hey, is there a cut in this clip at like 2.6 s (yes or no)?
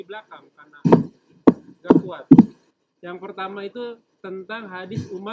yes